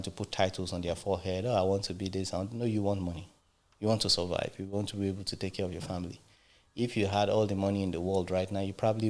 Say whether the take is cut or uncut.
uncut